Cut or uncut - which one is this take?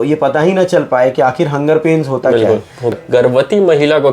cut